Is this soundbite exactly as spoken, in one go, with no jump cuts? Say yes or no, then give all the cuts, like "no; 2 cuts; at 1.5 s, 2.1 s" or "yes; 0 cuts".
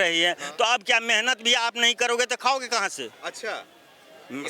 yes; 0 cuts